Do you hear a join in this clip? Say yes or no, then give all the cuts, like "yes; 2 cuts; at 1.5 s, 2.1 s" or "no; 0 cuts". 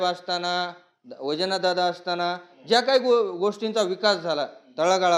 no; 0 cuts